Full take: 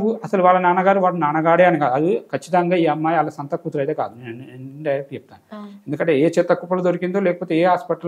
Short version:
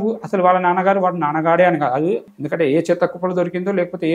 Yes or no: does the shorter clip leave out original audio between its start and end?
yes